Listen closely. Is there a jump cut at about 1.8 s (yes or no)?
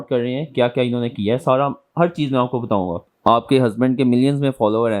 no